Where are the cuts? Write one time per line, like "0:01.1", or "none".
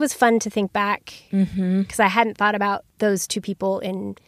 0:02.9